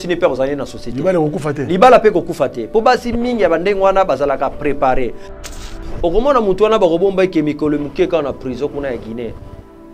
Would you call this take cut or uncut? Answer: cut